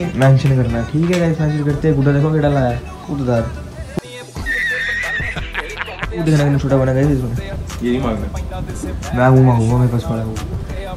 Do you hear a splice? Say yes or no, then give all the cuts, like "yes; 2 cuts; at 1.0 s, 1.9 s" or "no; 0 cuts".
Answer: no; 0 cuts